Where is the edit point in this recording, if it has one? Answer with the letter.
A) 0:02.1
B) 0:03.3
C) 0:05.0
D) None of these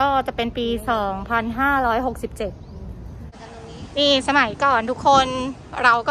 B